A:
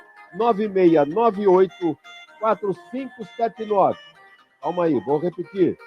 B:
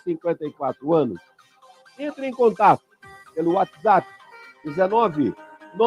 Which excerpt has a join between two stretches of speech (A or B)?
A